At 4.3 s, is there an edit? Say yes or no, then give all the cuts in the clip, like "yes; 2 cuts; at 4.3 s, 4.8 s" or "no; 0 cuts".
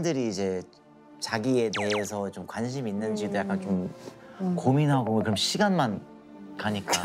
yes; 1 cut; at 4.3 s